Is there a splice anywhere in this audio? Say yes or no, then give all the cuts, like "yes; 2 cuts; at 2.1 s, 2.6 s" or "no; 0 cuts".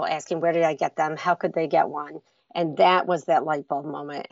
no; 0 cuts